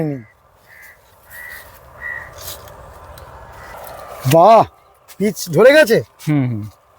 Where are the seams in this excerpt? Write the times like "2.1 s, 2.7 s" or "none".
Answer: 3.8 s